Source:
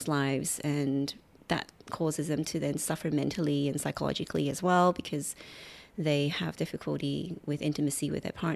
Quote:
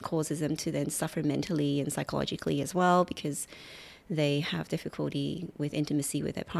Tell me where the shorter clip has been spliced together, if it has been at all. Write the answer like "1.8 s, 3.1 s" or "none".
none